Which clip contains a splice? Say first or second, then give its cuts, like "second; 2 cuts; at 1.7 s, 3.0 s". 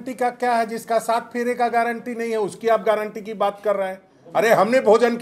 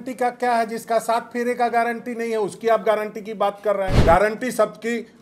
second; 1 cut; at 4.0 s